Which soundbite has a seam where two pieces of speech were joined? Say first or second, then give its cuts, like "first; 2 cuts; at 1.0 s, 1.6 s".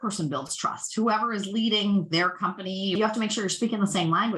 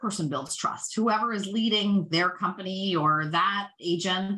first; 1 cut; at 2.9 s